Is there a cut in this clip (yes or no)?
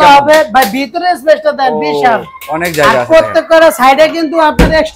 no